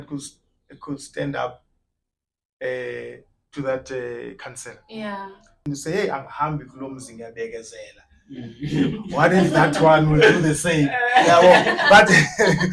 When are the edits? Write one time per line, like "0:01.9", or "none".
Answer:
0:05.4